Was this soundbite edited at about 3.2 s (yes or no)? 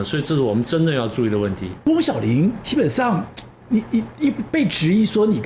no